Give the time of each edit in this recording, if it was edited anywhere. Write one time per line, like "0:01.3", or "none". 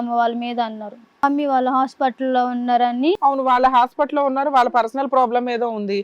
0:01.2